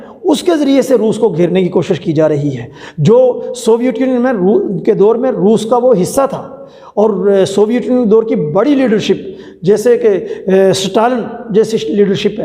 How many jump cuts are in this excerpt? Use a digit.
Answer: 0